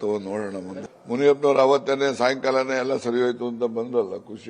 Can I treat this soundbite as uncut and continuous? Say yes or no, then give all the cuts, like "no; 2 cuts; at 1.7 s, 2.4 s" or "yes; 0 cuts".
yes; 0 cuts